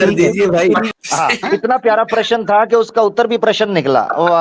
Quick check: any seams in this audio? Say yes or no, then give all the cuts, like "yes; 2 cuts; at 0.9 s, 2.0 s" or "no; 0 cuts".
yes; 1 cut; at 0.9 s